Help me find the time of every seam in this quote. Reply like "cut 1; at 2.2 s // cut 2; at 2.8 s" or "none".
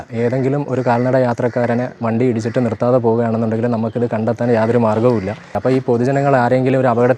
cut 1; at 5.5 s